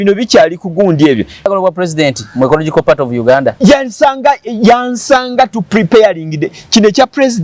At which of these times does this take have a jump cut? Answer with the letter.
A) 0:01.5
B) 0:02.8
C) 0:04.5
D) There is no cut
A